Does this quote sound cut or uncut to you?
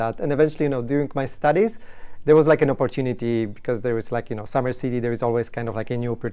uncut